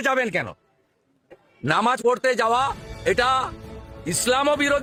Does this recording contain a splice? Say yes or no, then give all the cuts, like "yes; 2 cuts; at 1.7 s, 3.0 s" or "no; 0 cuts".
no; 0 cuts